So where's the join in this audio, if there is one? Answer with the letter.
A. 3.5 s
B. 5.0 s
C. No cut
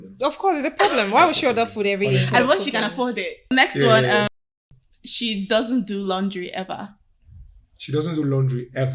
A